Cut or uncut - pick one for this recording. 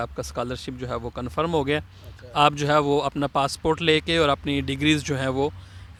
uncut